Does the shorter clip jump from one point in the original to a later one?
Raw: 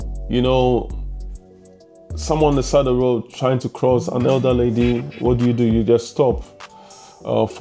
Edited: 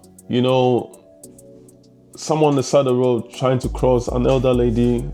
no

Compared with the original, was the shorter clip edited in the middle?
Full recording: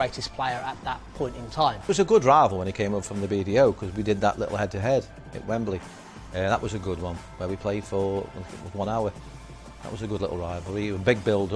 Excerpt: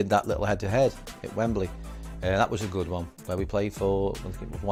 no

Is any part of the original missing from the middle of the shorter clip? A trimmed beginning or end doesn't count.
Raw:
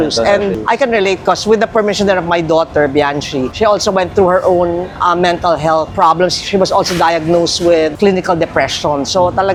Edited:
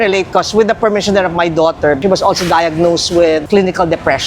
yes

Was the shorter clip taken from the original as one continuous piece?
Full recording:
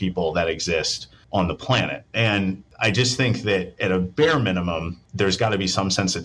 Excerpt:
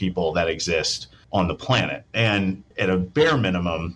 no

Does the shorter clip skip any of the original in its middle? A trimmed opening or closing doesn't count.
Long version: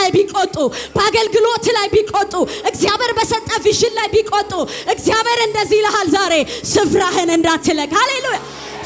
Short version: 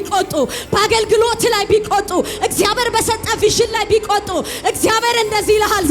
no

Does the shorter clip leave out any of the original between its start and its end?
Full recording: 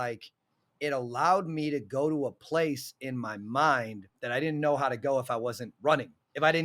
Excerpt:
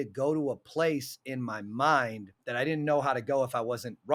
no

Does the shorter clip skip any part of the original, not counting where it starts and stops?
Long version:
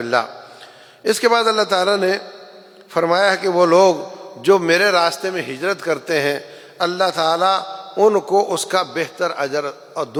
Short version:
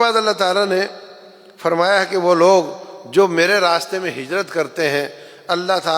no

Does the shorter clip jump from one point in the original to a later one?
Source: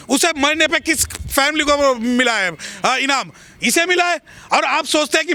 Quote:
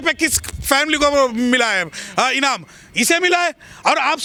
no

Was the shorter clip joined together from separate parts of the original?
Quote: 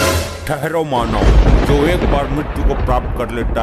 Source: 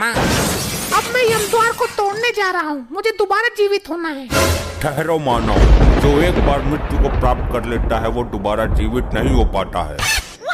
no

